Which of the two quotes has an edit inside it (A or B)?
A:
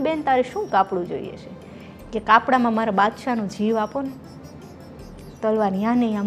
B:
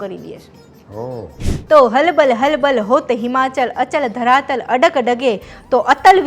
B